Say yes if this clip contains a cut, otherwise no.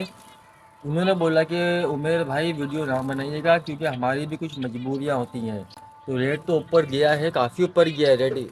no